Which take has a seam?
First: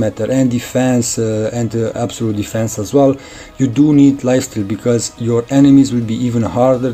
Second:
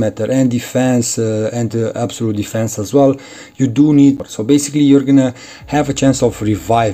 second; 1 cut; at 4.2 s

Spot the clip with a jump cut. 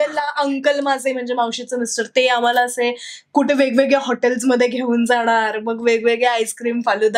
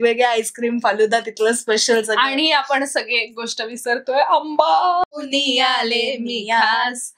second; 1 cut; at 5.1 s

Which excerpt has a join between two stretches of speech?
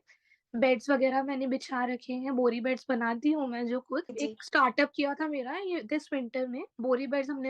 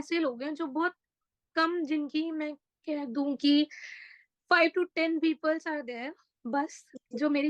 first; 2 cuts; at 4.1 s, 6.7 s

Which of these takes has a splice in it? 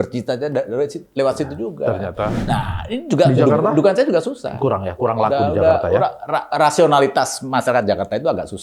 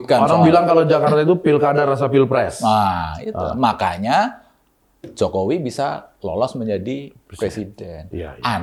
first; 1 cut; at 2.4 s

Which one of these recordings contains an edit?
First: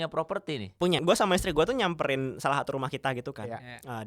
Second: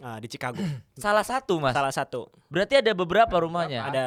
first; 1 cut; at 1.0 s

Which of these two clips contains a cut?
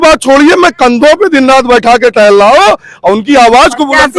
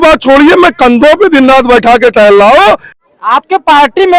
second; 1 cut; at 2.9 s

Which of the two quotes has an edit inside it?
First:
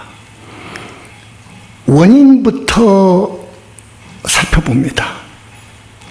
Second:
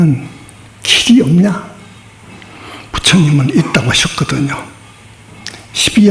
first; 1 cut; at 1.3 s

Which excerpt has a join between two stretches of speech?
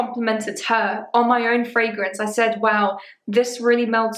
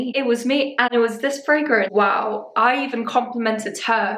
second; 1 cut; at 1.9 s

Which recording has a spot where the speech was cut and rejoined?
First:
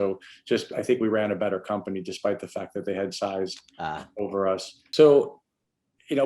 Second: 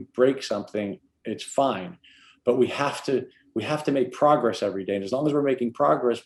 first; 1 cut; at 4.7 s

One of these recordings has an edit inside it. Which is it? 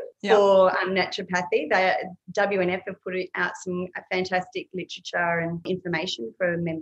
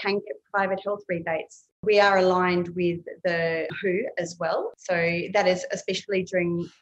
second; 1 cut; at 1.8 s

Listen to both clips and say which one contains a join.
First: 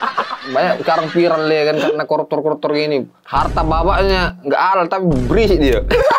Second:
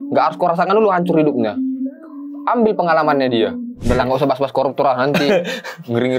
second; 1 cut; at 3.7 s

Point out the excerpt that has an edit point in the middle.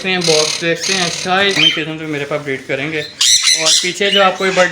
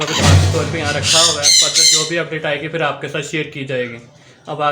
first; 1 cut; at 1.6 s

